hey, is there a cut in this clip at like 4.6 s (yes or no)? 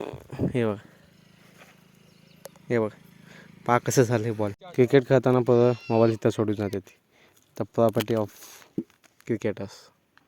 yes